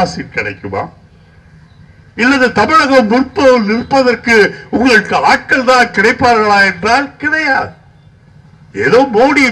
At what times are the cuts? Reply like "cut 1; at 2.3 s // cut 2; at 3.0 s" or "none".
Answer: none